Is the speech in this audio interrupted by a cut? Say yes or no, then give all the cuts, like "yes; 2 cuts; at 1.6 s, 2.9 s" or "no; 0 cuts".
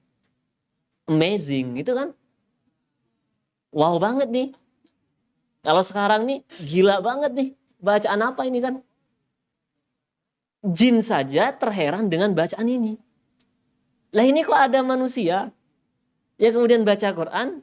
no; 0 cuts